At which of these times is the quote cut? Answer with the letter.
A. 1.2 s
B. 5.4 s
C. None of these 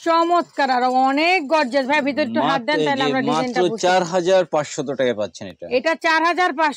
C